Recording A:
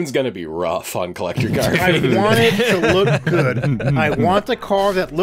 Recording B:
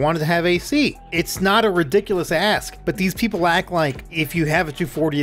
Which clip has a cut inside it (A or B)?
B